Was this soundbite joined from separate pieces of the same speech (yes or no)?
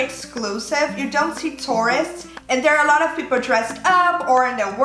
no